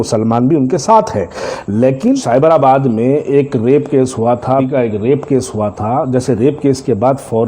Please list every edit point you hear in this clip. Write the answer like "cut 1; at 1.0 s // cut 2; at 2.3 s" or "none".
cut 1; at 2.2 s // cut 2; at 4.7 s